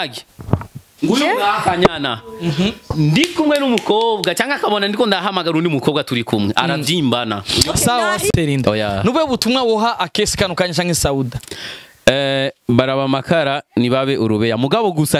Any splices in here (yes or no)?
yes